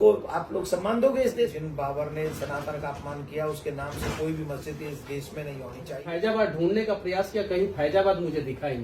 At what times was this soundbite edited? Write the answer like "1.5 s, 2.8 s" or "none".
1.6 s, 6.1 s